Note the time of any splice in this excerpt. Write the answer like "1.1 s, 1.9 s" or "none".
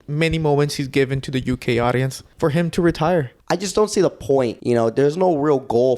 2.2 s, 3.4 s, 4.6 s

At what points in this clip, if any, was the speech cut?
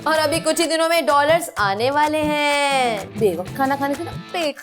3.0 s

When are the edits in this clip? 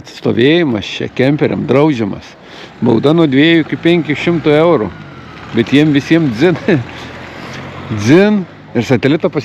none

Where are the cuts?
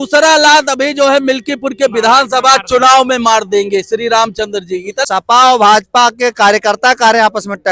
5.0 s

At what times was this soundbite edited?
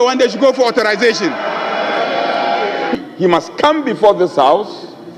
2.9 s

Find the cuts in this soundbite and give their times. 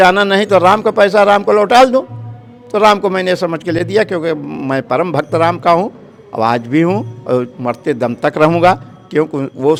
none

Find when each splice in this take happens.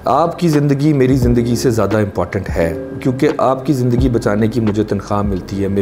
none

